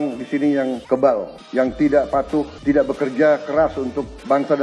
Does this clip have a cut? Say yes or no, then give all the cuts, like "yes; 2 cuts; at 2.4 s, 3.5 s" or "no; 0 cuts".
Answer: yes; 3 cuts; at 0.8 s, 1.4 s, 2.5 s